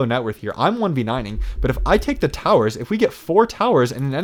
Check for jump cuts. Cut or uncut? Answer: uncut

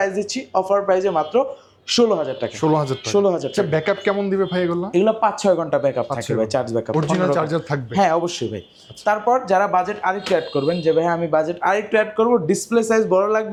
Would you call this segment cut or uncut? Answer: uncut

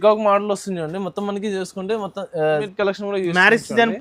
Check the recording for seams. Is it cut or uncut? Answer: cut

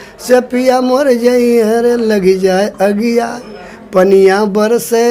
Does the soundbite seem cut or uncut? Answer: uncut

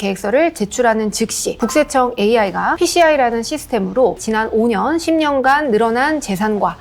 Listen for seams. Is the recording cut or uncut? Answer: uncut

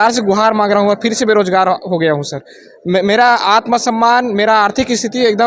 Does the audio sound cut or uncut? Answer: uncut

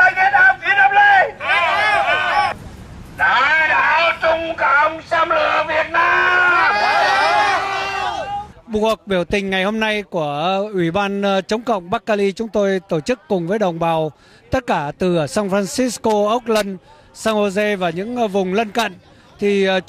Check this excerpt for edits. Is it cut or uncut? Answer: uncut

